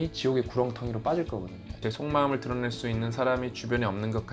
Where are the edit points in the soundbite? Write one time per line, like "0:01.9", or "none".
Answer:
0:01.8